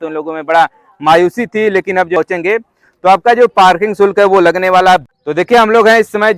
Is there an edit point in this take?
yes; 2 cuts; at 2.2 s, 5.0 s

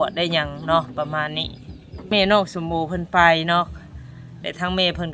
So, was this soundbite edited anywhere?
yes; 1 cut; at 2.1 s

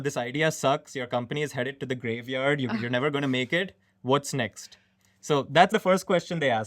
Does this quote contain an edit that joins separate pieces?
yes; 1 cut; at 5.7 s

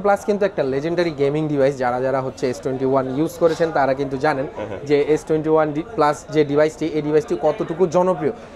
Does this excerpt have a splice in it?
no; 0 cuts

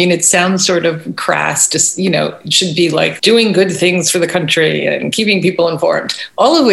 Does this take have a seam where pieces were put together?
yes; 1 cut; at 3.2 s

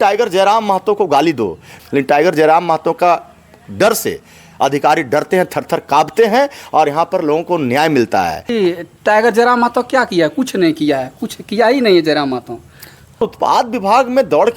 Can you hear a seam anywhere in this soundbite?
yes; 3 cuts; at 1.7 s, 8.5 s, 13.2 s

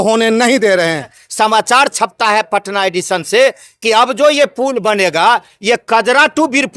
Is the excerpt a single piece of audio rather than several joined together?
no; 1 cut; at 1.2 s

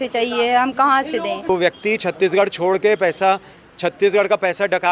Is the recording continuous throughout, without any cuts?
no; 1 cut; at 1.5 s

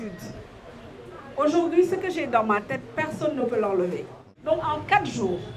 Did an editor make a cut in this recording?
yes; 1 cut; at 4.2 s

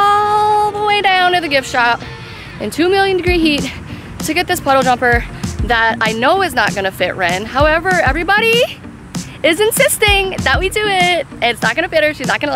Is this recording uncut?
yes; 0 cuts

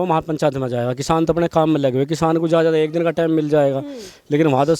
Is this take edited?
no; 0 cuts

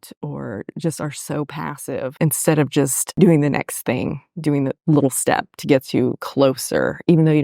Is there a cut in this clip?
yes; 2 cuts; at 2.1 s, 3.0 s

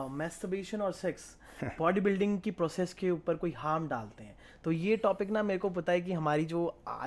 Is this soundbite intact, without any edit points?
yes; 0 cuts

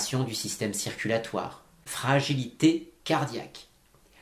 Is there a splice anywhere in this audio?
yes; 1 cut; at 1.8 s

